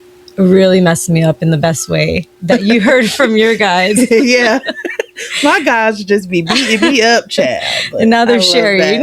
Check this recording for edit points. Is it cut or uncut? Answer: uncut